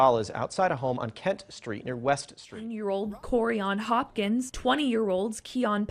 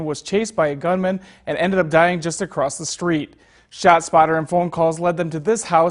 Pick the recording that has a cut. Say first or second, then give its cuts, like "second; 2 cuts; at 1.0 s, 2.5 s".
first; 1 cut; at 2.7 s